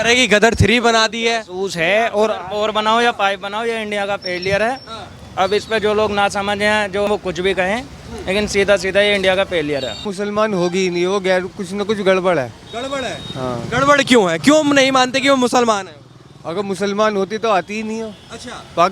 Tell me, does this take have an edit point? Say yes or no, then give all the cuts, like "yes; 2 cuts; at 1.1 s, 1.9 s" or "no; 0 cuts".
yes; 2 cuts; at 7.1 s, 10.1 s